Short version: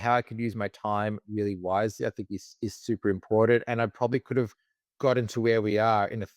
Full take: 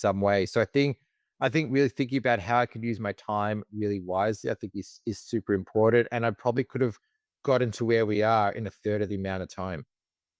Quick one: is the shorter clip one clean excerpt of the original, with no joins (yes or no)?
yes